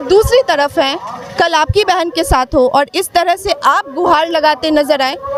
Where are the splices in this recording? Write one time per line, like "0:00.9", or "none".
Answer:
none